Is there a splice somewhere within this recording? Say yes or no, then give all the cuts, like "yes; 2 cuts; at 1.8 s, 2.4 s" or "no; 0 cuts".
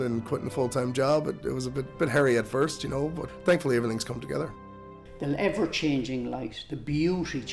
yes; 3 cuts; at 1.9 s, 3.3 s, 4.7 s